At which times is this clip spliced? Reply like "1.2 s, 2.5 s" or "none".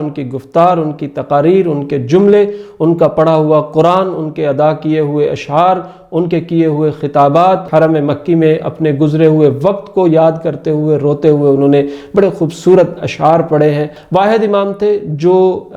7.6 s, 14.0 s